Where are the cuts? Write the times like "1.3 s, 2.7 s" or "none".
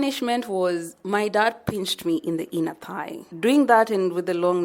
3.3 s